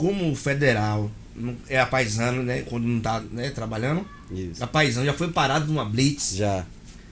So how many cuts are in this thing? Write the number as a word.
zero